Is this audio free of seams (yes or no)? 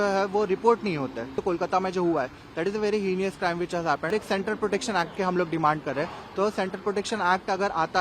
no